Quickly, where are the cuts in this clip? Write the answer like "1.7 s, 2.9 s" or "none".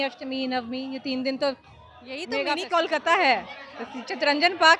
2.4 s